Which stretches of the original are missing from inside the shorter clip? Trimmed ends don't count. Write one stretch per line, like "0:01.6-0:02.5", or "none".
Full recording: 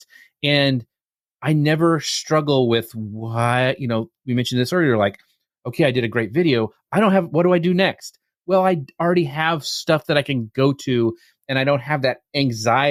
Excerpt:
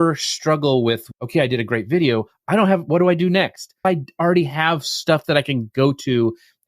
0:03.0-0:05.6
0:08.3-0:08.6